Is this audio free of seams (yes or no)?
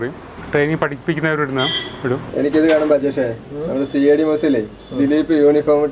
no